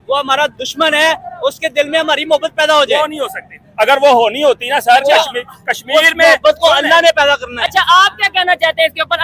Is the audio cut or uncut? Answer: uncut